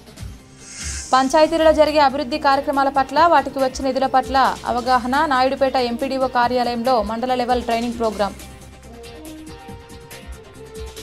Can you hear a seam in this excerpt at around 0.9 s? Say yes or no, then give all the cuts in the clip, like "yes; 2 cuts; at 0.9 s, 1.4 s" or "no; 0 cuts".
no; 0 cuts